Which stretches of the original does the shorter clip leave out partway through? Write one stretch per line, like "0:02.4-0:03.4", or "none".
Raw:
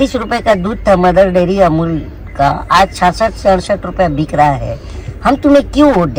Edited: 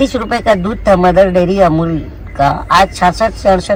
none